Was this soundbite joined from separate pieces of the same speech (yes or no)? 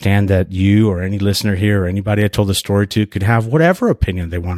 no